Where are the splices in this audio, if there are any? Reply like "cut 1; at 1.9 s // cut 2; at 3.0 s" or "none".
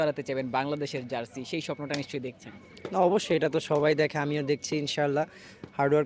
none